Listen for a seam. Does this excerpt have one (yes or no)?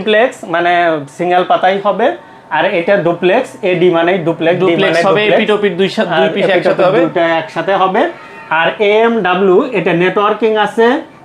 no